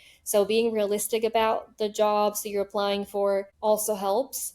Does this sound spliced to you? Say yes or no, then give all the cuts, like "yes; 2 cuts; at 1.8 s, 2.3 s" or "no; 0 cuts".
yes; 1 cut; at 3.5 s